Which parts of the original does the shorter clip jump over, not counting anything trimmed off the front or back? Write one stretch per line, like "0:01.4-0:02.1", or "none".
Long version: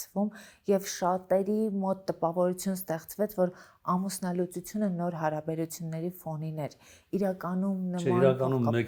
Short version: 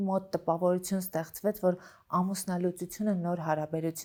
none